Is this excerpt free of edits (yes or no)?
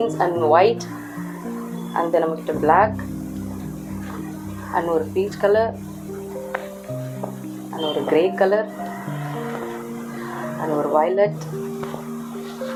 yes